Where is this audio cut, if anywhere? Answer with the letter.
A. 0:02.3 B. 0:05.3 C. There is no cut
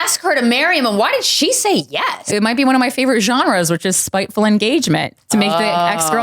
A